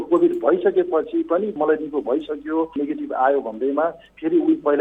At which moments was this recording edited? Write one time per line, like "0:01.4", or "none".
0:01.6
0:02.7